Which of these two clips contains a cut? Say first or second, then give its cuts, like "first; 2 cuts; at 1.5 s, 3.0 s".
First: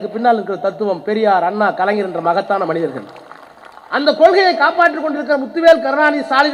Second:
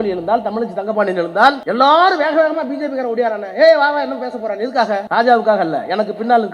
second; 2 cuts; at 1.6 s, 5.0 s